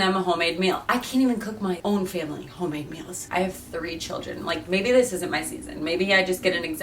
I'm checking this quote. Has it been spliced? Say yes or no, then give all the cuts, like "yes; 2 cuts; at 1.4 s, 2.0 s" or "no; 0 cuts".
yes; 2 cuts; at 1.8 s, 3.1 s